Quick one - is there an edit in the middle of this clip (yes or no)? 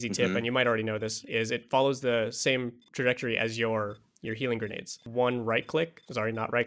yes